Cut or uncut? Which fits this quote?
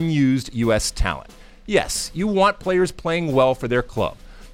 uncut